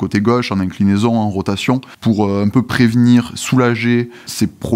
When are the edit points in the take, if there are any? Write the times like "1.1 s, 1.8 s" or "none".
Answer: 1.9 s